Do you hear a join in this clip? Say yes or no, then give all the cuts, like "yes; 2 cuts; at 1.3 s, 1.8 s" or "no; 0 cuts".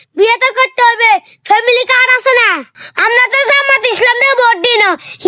yes; 1 cut; at 2.7 s